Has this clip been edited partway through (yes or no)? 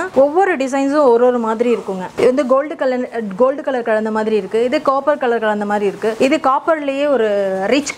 no